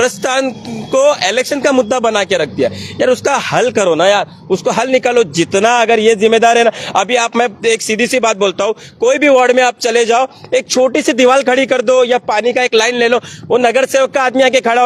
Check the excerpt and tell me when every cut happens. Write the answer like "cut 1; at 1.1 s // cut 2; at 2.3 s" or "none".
none